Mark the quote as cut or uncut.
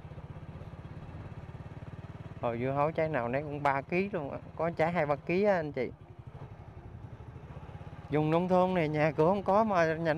cut